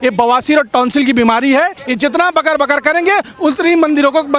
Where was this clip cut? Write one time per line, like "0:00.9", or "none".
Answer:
0:01.8